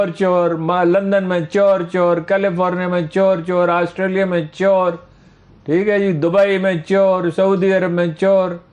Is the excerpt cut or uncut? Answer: uncut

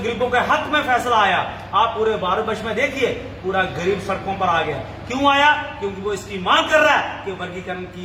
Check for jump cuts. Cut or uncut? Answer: uncut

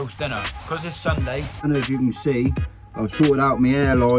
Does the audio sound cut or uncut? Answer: cut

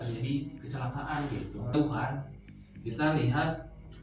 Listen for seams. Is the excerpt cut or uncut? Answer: cut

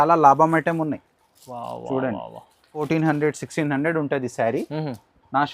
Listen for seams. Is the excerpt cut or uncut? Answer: cut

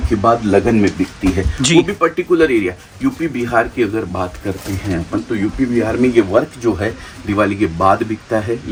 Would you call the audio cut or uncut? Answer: uncut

